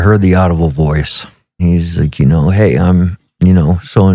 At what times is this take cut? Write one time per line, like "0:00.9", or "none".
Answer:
0:01.6